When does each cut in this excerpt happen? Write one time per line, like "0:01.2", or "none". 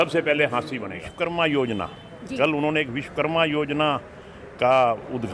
0:01.1